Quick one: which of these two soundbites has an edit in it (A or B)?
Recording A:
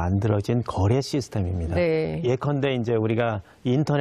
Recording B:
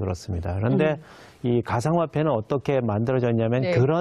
B